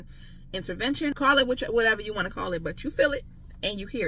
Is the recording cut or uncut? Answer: cut